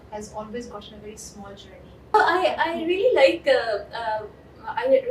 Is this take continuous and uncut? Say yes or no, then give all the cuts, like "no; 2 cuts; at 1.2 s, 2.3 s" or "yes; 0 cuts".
no; 1 cut; at 2.1 s